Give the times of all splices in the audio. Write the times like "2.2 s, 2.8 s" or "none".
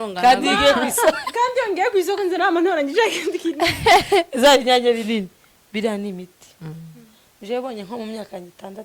6.8 s